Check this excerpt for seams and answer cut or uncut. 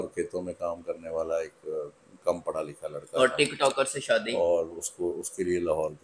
uncut